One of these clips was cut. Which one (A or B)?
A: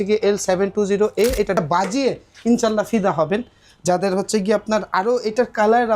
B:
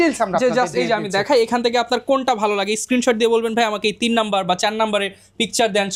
A